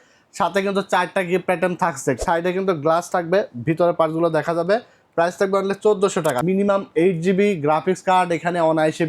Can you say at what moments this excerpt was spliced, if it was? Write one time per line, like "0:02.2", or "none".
0:02.2
0:06.4